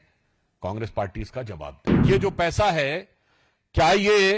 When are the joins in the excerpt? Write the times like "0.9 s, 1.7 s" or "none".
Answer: 1.9 s